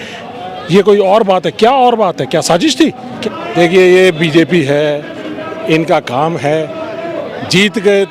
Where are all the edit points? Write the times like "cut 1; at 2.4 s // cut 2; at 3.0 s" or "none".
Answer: cut 1; at 3.1 s